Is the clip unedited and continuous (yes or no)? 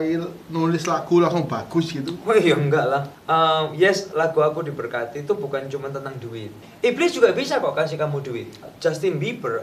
no